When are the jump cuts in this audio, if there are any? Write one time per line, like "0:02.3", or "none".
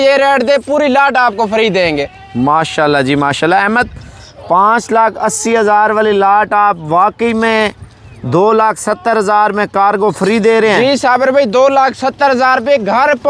none